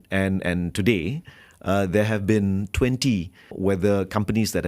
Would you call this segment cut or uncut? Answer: cut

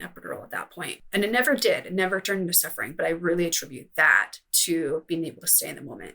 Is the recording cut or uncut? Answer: cut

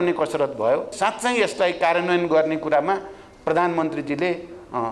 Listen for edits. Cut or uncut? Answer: cut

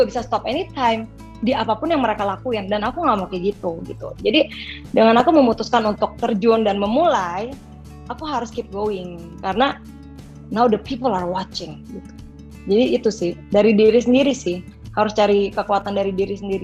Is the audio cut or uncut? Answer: uncut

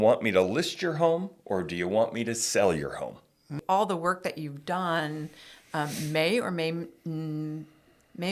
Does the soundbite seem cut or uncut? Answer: cut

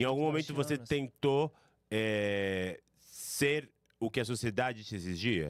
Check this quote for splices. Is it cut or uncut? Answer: uncut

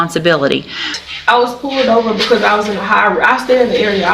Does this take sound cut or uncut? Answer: cut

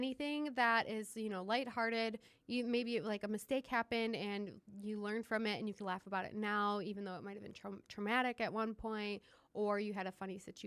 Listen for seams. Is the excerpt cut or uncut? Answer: uncut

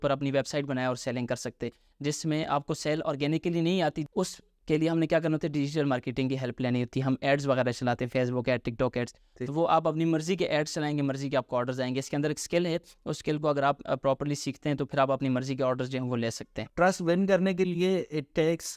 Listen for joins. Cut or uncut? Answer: cut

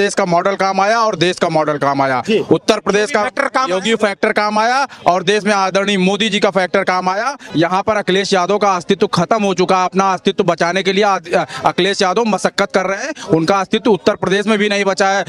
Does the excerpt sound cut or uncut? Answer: cut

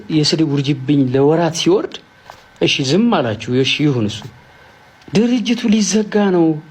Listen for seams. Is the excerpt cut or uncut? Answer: uncut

